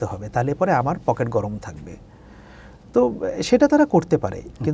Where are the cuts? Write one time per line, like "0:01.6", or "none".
none